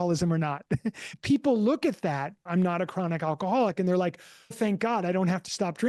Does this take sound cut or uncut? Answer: cut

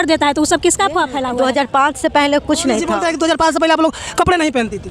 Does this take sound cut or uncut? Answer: cut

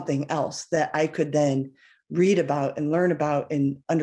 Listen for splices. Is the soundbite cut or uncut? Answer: uncut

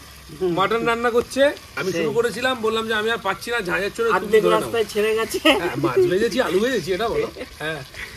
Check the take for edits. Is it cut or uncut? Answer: uncut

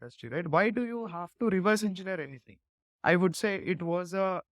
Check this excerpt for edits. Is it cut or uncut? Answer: cut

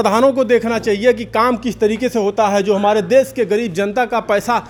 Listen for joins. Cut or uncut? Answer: uncut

